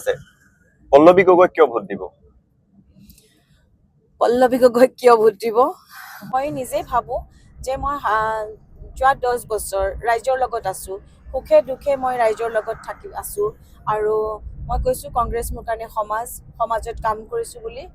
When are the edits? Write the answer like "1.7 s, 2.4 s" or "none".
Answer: none